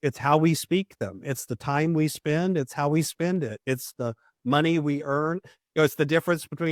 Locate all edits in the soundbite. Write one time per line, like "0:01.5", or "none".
none